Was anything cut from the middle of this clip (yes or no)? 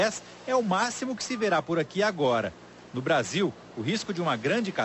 yes